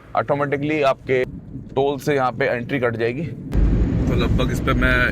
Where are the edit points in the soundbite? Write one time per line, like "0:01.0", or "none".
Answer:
0:01.9
0:03.4